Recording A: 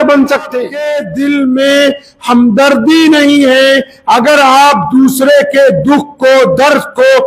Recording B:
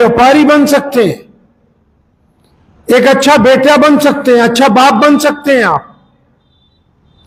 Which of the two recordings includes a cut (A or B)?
A